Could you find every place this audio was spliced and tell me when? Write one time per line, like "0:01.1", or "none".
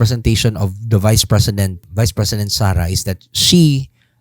0:01.8

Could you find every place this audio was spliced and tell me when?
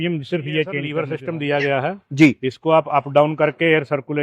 0:00.9

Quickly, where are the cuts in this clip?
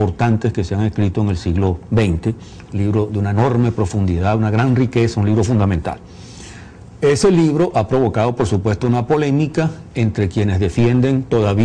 0:03.0

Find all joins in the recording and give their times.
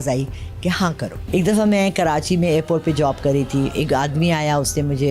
0:01.2

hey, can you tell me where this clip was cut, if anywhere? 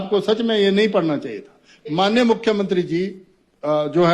0:01.8

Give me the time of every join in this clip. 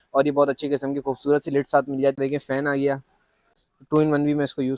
0:02.2
0:03.5

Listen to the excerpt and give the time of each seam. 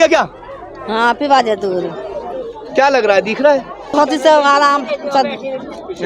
0:03.9

